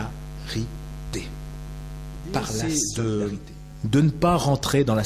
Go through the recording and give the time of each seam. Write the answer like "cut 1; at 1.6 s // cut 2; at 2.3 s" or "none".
cut 1; at 2.6 s